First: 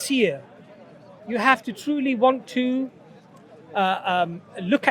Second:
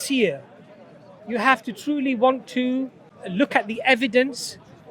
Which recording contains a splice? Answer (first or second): second